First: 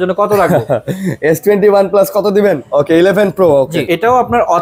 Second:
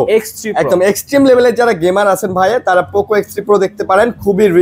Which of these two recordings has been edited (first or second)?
first